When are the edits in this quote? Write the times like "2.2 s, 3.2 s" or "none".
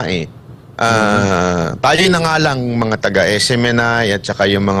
none